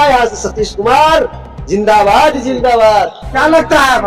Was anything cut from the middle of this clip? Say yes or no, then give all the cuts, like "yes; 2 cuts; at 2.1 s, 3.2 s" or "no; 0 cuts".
no; 0 cuts